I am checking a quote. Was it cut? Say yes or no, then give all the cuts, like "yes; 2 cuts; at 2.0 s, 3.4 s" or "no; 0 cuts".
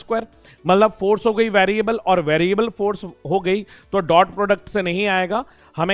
no; 0 cuts